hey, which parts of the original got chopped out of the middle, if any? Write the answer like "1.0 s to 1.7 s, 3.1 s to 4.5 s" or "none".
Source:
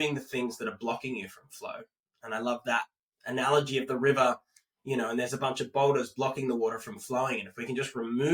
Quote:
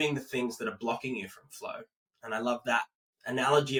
none